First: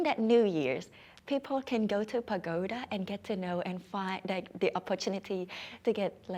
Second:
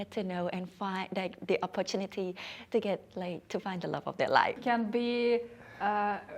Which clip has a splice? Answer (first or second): second